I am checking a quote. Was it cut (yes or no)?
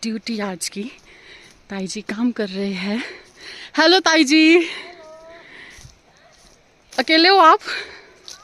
no